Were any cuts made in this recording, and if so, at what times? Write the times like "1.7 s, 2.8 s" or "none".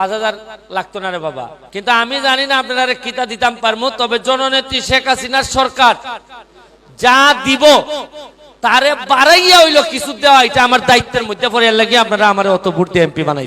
1.6 s